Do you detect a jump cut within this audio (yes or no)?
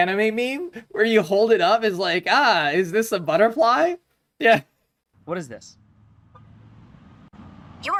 no